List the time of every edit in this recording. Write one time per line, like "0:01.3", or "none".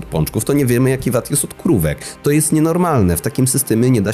none